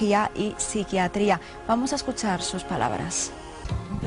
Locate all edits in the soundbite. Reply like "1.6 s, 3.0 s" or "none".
1.6 s